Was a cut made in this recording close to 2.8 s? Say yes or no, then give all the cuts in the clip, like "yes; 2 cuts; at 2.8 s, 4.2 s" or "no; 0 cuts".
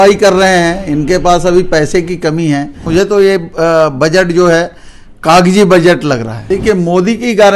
yes; 2 cuts; at 2.8 s, 6.3 s